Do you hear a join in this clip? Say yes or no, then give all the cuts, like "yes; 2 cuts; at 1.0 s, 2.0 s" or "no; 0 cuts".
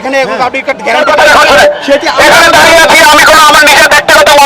yes; 1 cut; at 1.0 s